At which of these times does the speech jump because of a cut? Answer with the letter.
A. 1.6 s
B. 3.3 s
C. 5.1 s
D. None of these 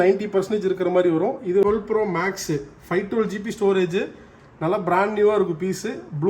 A